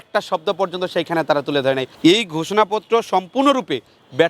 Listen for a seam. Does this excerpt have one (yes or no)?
yes